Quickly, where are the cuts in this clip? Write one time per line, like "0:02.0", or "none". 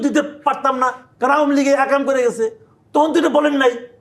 0:01.0